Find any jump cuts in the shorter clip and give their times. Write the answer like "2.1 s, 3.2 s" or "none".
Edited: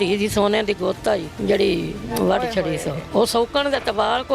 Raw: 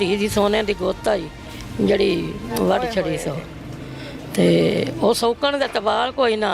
1.3 s, 3.0 s